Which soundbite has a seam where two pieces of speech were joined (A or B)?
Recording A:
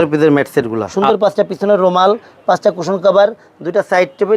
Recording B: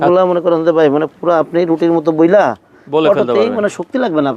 A